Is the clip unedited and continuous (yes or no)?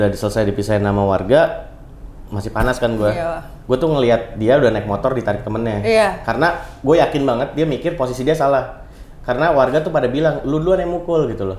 yes